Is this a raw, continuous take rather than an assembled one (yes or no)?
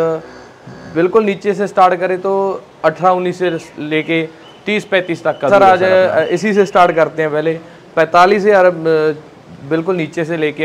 no